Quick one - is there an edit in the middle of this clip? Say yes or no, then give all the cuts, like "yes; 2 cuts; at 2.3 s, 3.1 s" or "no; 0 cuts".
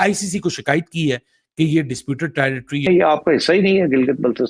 yes; 1 cut; at 2.9 s